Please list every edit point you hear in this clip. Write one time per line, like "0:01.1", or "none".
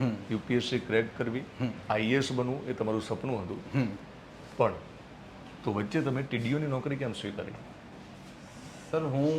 none

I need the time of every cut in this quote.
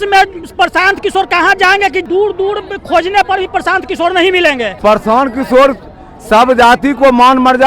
0:02.0
0:04.8

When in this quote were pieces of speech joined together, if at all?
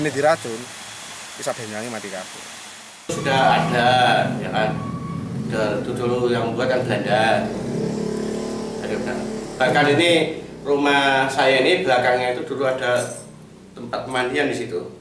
0:03.1

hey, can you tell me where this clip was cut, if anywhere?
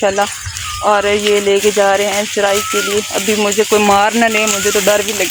none

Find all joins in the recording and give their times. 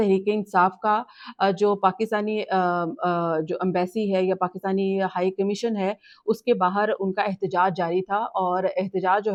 none

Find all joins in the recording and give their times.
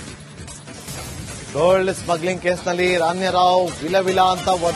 0:01.0

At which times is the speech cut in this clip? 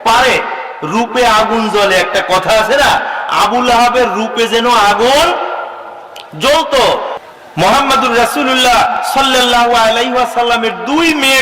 0:07.1

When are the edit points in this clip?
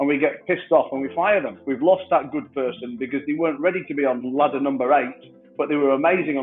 0:01.6
0:04.3

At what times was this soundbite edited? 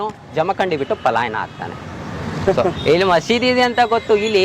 none

